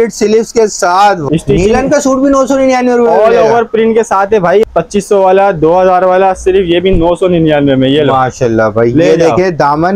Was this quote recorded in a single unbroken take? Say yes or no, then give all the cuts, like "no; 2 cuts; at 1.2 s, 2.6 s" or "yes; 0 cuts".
no; 2 cuts; at 1.2 s, 4.6 s